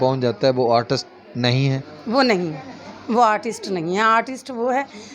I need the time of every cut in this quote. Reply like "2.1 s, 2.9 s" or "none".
none